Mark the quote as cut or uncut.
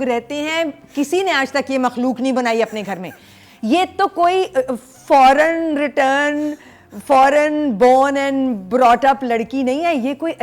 uncut